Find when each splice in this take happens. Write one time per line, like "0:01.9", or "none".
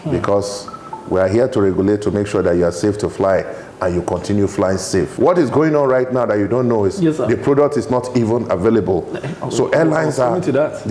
0:05.1